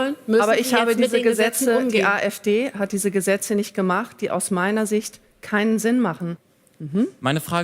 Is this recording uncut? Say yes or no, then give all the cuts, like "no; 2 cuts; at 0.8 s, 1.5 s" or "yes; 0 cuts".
no; 1 cut; at 6.3 s